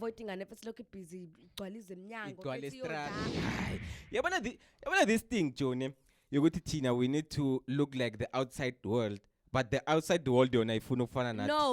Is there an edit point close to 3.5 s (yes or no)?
yes